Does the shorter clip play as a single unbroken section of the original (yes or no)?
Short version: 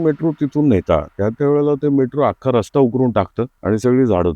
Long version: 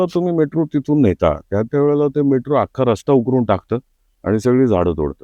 no